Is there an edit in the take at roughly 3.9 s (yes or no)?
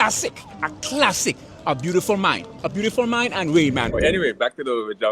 yes